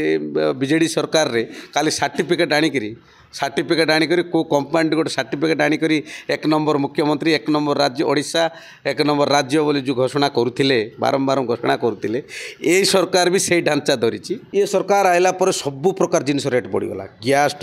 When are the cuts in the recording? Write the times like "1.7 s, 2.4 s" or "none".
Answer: 14.4 s